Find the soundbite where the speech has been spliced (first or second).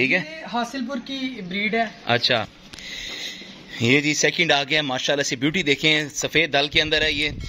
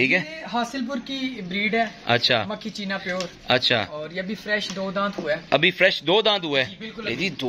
first